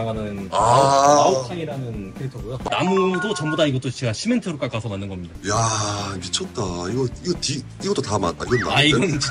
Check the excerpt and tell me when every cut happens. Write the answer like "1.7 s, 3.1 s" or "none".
2.6 s